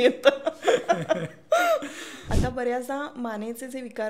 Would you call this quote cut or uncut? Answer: cut